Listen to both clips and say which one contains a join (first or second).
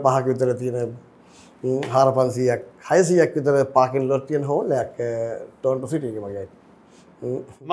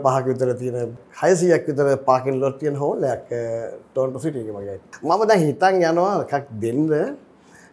second